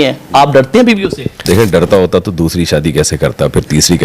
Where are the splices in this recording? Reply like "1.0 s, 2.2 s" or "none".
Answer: 1.0 s